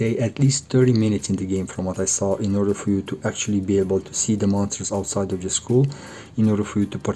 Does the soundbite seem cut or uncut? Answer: uncut